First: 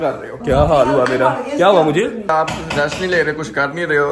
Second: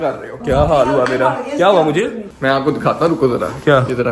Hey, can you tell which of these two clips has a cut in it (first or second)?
first